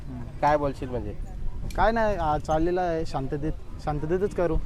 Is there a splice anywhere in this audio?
no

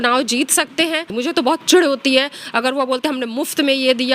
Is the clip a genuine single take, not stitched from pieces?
no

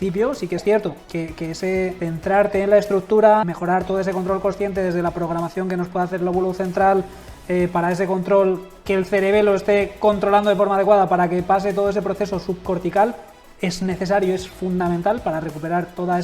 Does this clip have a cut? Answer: yes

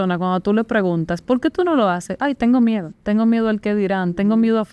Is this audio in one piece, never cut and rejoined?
yes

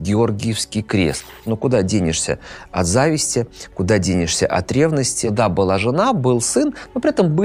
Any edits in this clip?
yes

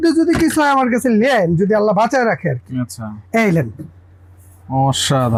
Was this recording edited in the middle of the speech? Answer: no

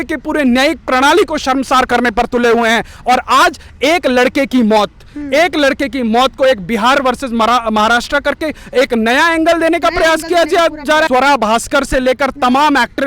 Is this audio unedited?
no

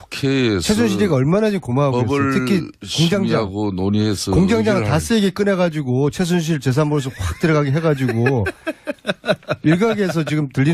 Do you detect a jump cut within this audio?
yes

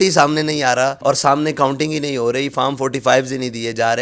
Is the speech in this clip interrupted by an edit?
yes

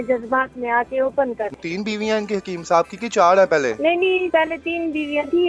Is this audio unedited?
no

